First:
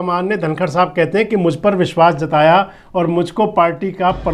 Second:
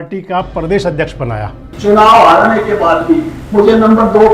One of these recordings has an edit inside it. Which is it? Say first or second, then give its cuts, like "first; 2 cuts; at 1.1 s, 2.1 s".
second; 1 cut; at 1.7 s